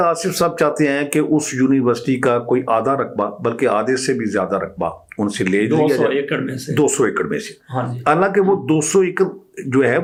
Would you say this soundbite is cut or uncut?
uncut